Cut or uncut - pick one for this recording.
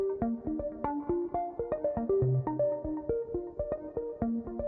uncut